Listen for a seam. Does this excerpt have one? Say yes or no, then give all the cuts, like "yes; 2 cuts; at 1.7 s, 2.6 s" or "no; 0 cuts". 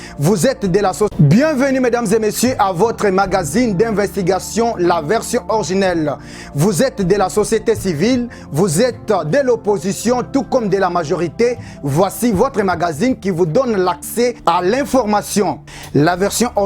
yes; 1 cut; at 1.1 s